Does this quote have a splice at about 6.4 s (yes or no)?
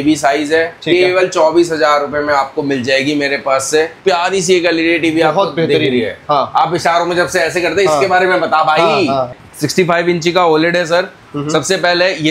no